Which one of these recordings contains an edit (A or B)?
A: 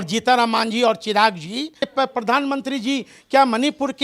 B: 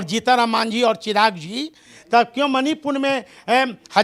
A